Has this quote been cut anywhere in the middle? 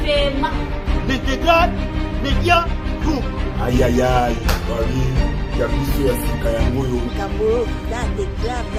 no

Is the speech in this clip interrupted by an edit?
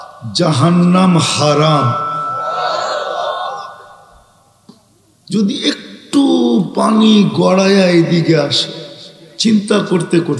no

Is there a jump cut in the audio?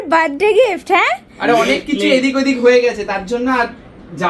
no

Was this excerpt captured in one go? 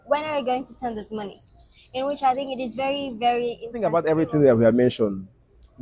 no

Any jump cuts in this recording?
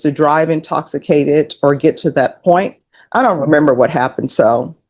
yes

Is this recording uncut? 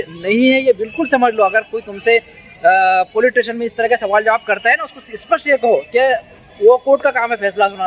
yes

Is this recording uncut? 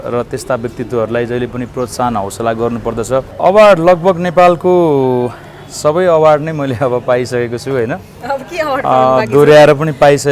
no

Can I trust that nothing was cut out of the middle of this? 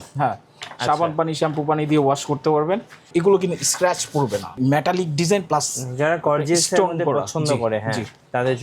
no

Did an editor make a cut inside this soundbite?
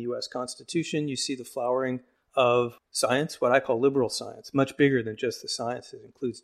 yes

